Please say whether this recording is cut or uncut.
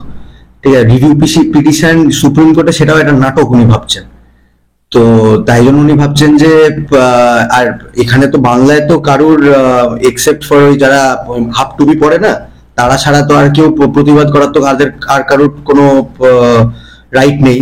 uncut